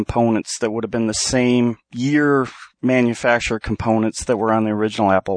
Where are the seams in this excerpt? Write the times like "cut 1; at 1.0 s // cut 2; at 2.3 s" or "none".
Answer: cut 1; at 1.9 s